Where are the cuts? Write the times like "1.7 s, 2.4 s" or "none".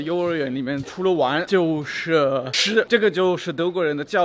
1.1 s, 2.8 s